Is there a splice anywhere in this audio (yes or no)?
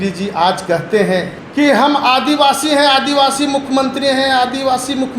yes